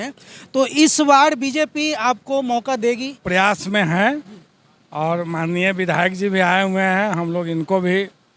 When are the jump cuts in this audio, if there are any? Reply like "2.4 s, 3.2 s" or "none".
3.2 s